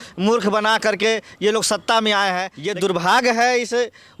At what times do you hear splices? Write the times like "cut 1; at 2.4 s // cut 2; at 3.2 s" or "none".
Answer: cut 1; at 2.6 s